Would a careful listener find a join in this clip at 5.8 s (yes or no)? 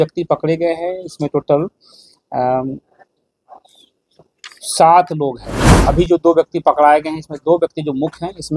yes